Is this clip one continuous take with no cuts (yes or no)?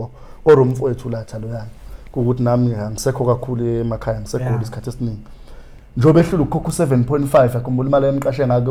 yes